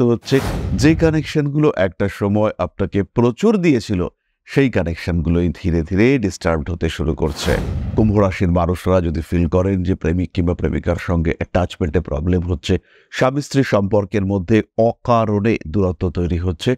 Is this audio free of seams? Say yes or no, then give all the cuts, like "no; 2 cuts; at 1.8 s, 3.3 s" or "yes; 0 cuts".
yes; 0 cuts